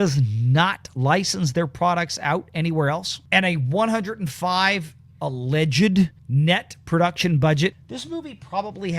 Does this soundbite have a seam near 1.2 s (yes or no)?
no